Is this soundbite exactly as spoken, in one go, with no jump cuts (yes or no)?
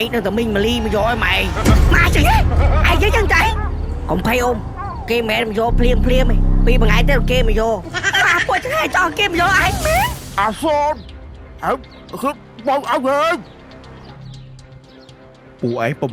no